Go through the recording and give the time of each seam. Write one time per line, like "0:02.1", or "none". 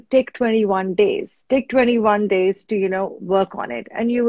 0:03.2